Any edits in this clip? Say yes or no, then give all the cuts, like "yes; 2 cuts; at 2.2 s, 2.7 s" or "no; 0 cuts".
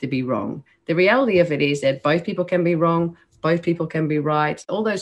no; 0 cuts